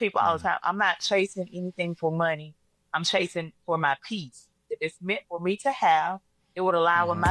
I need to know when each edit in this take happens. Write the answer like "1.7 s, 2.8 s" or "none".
4.8 s